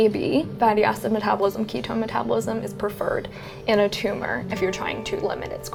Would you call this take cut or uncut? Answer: uncut